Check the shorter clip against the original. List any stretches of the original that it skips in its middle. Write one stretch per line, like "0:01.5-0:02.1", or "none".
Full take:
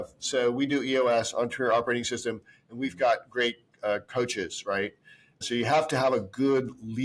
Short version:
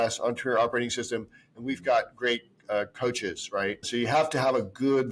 0:05.0-0:05.4